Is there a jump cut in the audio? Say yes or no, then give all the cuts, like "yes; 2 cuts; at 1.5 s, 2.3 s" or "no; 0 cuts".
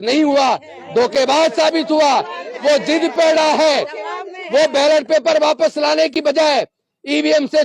no; 0 cuts